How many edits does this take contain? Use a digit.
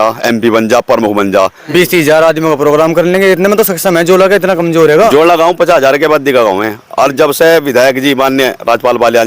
2